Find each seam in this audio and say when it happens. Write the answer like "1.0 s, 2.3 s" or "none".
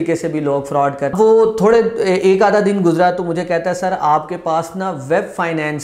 1.1 s